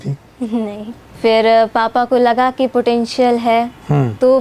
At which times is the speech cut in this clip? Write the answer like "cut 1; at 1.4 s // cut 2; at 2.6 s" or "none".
cut 1; at 1.1 s